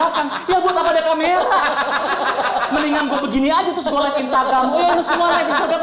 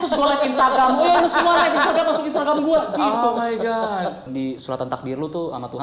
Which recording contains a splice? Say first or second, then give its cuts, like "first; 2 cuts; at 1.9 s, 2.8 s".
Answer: second; 1 cut; at 4.2 s